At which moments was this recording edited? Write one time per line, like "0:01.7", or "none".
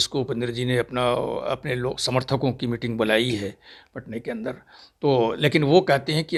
none